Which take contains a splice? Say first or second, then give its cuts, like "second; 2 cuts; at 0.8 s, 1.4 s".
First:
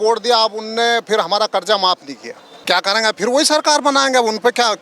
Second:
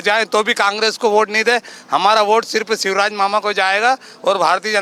first; 1 cut; at 2.6 s